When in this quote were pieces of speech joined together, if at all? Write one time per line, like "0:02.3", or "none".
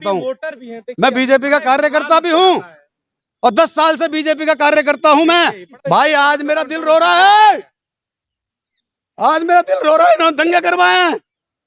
0:05.7